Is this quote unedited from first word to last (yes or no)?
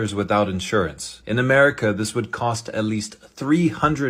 yes